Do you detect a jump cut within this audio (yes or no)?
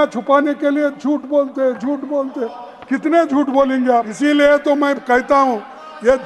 yes